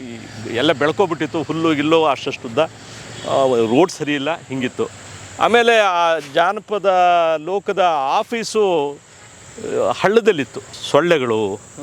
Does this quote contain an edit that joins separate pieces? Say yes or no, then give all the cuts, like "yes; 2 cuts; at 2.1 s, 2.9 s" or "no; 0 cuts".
yes; 1 cut; at 10.7 s